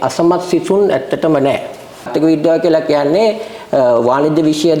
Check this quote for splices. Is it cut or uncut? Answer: cut